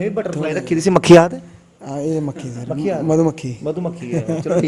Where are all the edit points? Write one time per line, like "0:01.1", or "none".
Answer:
none